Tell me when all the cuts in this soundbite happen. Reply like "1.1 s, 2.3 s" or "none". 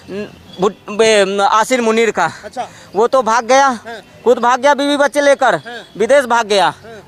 none

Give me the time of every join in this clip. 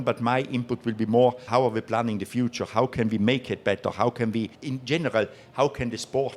1.4 s, 4.6 s

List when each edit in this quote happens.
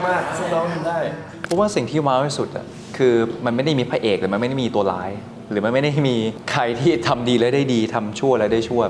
1.3 s, 6.4 s

